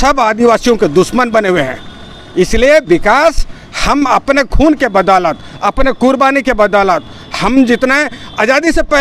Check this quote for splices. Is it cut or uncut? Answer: uncut